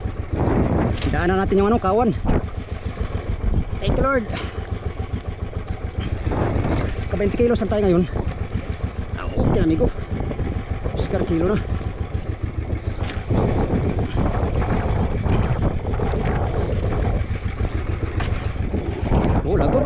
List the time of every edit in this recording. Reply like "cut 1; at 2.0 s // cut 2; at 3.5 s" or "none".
none